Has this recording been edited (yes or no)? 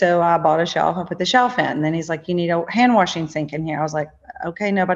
no